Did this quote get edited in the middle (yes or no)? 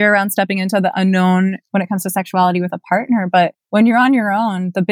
yes